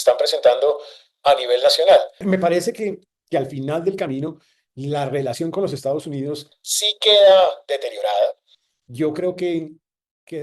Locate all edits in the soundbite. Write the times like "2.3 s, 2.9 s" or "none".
2.2 s